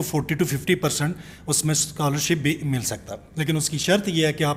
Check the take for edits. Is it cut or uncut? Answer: uncut